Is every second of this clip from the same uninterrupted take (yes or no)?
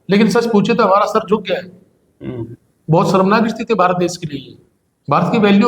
yes